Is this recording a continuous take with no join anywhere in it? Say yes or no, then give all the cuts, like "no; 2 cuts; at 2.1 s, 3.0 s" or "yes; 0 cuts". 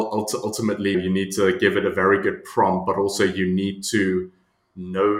no; 1 cut; at 0.9 s